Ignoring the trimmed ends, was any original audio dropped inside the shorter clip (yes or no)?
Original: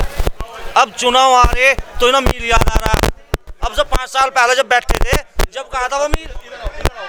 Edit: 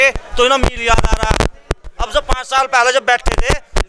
no